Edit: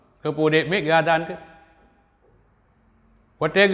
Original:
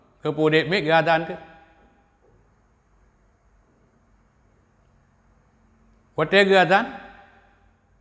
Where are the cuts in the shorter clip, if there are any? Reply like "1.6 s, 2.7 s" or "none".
2.7 s